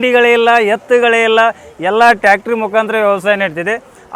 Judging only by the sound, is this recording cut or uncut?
uncut